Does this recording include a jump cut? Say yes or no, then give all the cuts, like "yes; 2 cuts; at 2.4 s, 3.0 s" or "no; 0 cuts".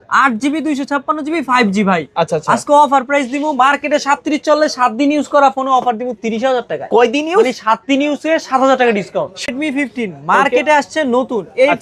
yes; 1 cut; at 9.5 s